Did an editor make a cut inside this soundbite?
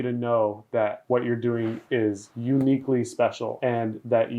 yes; 2 cuts; at 1.0 s, 3.5 s

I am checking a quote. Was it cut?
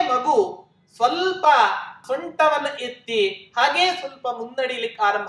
yes; 1 cut; at 2.0 s

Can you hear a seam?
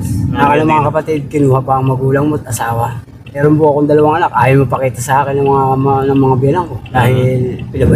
no; 0 cuts

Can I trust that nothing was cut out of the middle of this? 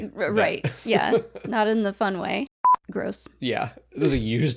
no; 1 cut; at 2.5 s

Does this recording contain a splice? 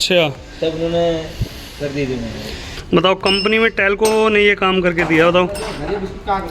yes; 1 cut; at 2.7 s

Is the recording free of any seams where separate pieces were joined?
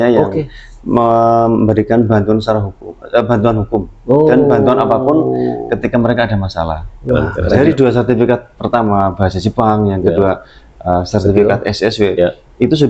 no; 1 cut; at 7.6 s

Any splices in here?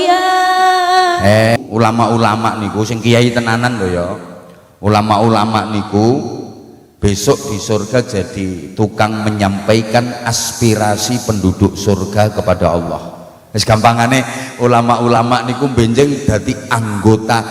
yes; 1 cut; at 1.6 s

